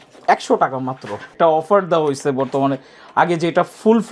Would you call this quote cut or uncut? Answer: cut